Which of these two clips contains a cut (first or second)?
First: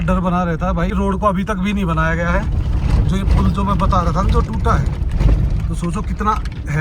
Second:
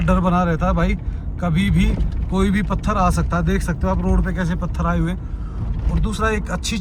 first